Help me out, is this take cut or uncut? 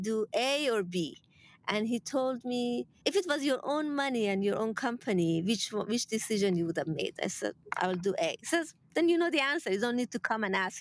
cut